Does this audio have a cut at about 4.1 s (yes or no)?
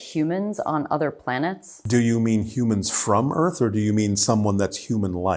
no